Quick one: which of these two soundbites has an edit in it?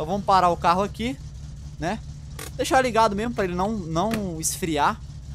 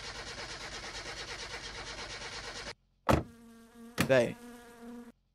second; 1 cut; at 2.7 s

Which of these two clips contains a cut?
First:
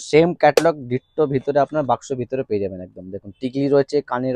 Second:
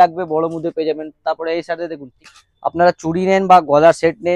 second; 1 cut; at 2.1 s

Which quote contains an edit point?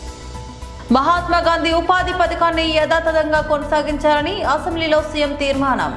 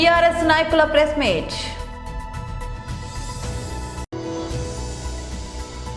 second; 1 cut; at 1.7 s

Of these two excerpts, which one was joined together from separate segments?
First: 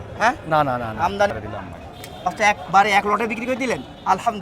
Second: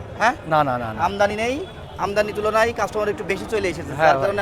first; 1 cut; at 1.3 s

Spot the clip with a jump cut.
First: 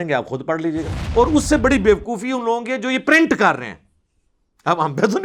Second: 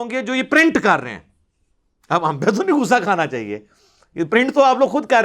first; 1 cut; at 1.0 s

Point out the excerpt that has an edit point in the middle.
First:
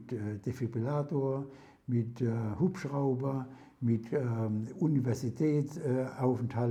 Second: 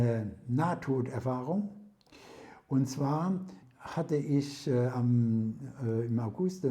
second; 1 cut; at 3.6 s

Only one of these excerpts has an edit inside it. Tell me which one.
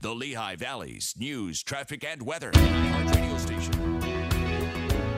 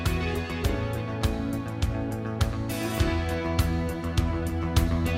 first; 1 cut; at 2.5 s

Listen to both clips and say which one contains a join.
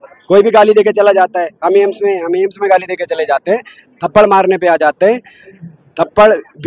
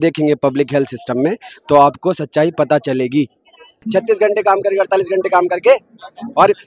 second; 1 cut; at 3.8 s

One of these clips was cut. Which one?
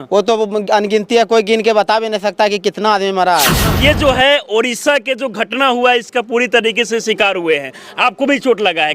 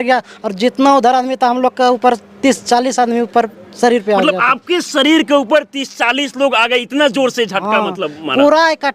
first; 1 cut; at 3.7 s

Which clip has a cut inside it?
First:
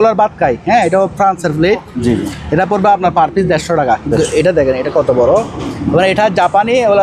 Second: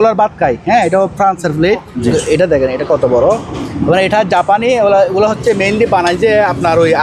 second; 1 cut; at 2.1 s

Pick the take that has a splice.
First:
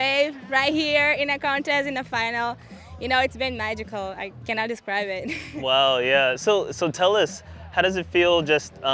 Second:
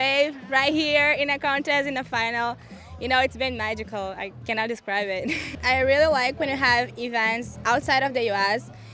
second; 1 cut; at 5.5 s

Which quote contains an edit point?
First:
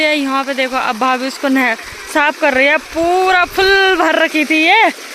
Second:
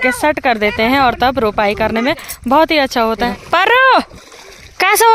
second; 1 cut; at 3.3 s

